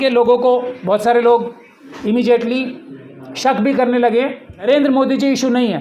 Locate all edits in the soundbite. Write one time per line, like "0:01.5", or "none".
0:04.5

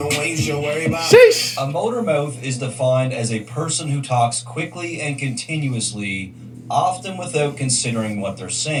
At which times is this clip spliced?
none

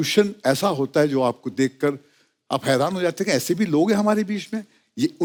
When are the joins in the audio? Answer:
none

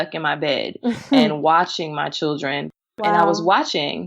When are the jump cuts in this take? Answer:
0:02.7

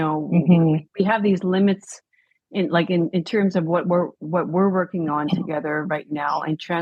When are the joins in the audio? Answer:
none

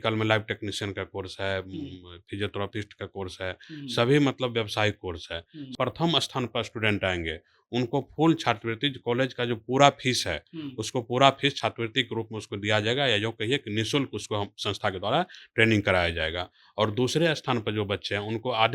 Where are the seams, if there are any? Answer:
0:05.7

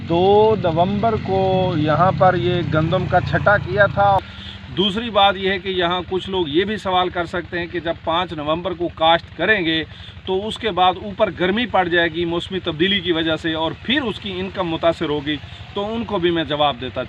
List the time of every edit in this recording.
0:04.2

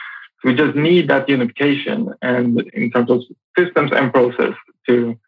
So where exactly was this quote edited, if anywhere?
0:02.7

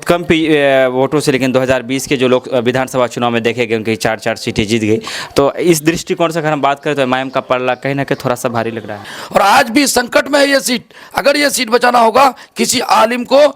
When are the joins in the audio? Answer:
0:09.1

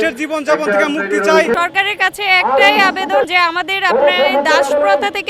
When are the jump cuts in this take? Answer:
0:01.5
0:03.3

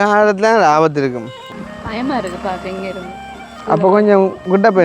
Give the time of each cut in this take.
0:01.3

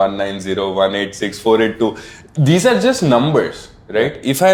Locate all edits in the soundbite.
none

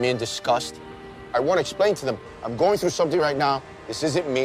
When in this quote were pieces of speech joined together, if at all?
0:01.3

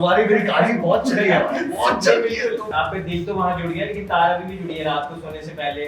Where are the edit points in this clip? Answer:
0:02.7

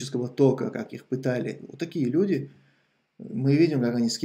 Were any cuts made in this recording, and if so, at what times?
none

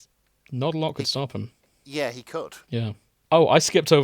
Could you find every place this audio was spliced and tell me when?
0:02.6

